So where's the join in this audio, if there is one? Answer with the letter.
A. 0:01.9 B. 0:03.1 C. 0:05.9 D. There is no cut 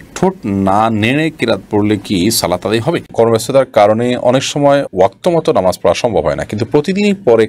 B